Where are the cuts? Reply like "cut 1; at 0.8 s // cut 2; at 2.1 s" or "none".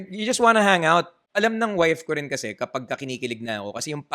cut 1; at 1.2 s